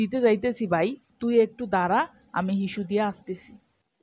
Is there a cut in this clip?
no; 0 cuts

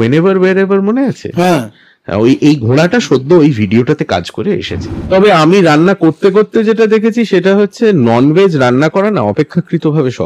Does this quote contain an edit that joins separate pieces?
yes; 1 cut; at 4.8 s

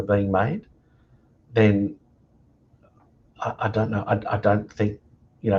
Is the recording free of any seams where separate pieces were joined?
yes; 0 cuts

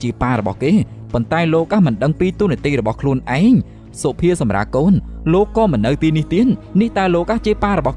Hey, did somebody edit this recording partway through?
no; 0 cuts

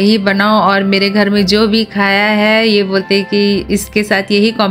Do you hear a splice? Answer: no; 0 cuts

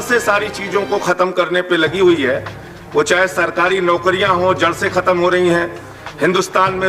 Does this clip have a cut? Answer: no; 0 cuts

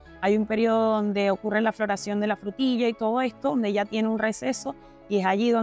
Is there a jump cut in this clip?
no; 0 cuts

